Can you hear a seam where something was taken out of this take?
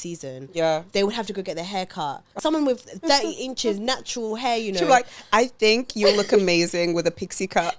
yes; 1 cut; at 2.4 s

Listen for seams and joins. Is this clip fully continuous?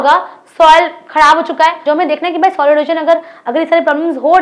no; 1 cut; at 1.8 s

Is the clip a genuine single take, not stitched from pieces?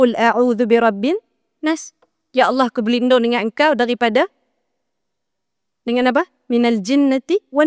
yes; 0 cuts

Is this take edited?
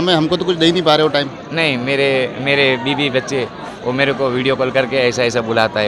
yes; 1 cut; at 3.7 s

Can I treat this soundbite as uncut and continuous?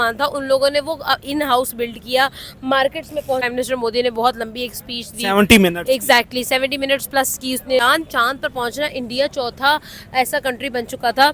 no; 2 cuts; at 3.5 s, 7.8 s

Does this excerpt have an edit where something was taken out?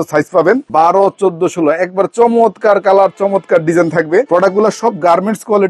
no; 0 cuts

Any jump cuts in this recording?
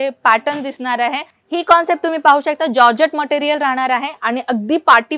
yes; 1 cut; at 1.3 s

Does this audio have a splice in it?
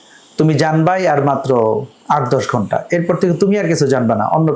no; 0 cuts

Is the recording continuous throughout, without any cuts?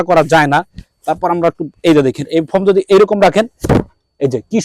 yes; 0 cuts

